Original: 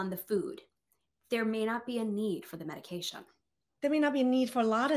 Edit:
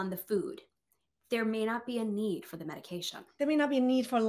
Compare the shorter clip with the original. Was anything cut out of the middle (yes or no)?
yes